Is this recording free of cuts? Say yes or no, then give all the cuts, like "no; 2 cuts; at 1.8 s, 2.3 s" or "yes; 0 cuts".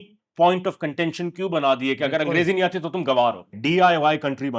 no; 1 cut; at 3.5 s